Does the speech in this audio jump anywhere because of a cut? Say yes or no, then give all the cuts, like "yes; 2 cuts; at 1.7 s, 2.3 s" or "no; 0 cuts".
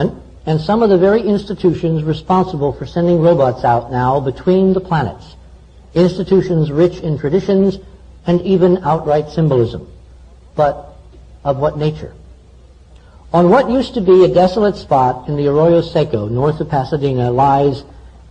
yes; 1 cut; at 9.3 s